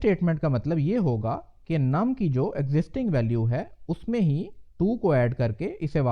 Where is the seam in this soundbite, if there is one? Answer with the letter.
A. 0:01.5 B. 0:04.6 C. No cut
B